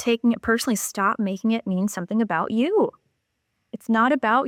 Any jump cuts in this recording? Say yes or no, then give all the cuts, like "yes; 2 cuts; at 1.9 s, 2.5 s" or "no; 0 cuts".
no; 0 cuts